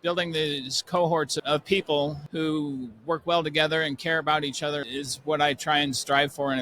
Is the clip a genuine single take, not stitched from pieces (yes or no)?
no